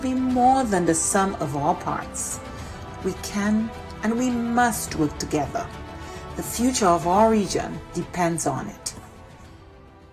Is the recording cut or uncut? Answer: uncut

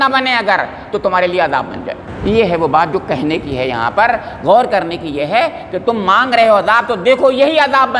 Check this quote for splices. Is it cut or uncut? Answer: cut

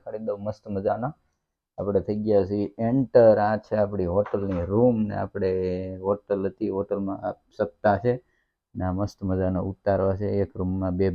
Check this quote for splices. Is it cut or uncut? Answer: uncut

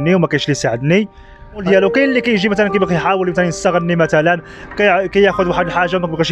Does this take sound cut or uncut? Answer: cut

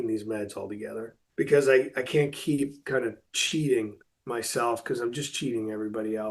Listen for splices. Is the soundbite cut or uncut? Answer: cut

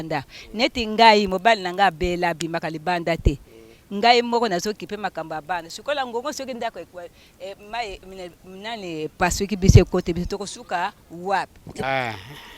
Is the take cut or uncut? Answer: cut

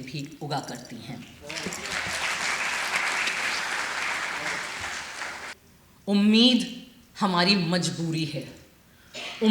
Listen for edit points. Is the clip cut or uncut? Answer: cut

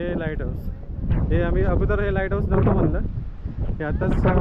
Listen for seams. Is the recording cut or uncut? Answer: uncut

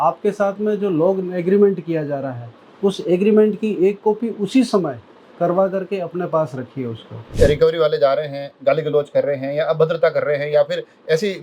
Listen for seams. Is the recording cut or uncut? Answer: cut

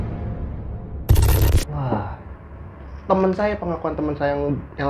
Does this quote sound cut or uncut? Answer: uncut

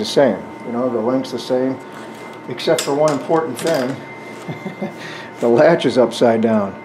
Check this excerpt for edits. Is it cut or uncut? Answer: uncut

